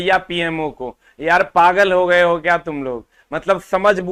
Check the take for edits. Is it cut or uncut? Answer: uncut